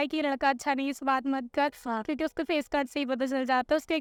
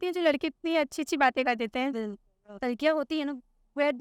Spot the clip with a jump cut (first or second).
second